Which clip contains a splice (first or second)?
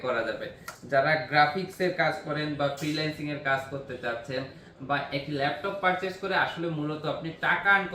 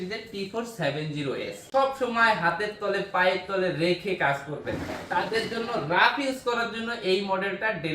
second